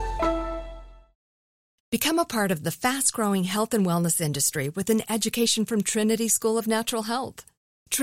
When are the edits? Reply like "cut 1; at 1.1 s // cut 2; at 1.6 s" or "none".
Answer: cut 1; at 1.5 s